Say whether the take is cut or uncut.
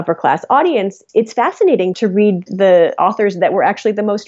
cut